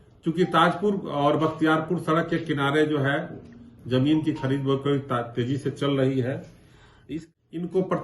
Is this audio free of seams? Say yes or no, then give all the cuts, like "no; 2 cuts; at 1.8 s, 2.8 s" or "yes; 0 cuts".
no; 1 cut; at 7.1 s